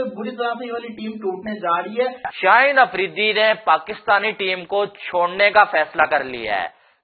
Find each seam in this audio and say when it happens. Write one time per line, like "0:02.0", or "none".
0:02.3